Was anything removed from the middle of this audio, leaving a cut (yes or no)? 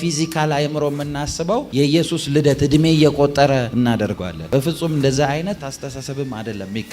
yes